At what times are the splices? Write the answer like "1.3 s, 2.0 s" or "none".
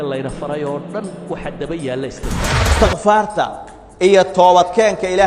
2.6 s

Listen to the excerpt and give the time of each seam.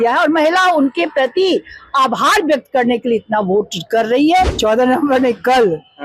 4.5 s

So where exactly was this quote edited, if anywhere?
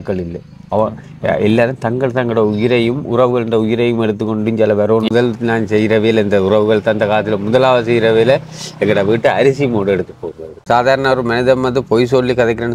5.1 s, 10.7 s

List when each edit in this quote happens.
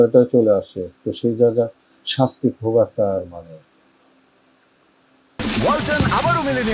5.3 s

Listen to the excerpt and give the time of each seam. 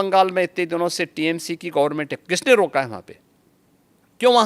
none

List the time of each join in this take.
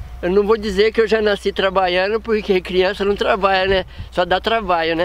none

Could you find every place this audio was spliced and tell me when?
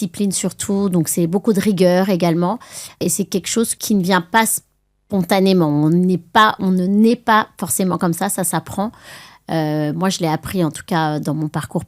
none

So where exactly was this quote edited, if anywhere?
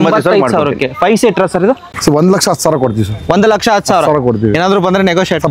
1.9 s

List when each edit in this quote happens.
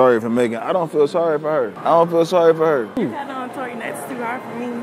1.8 s, 3.0 s

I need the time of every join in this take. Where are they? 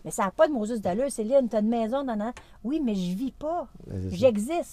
none

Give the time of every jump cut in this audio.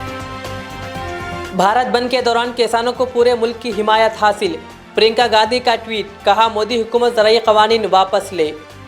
1.4 s

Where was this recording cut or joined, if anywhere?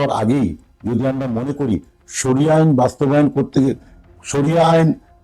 none

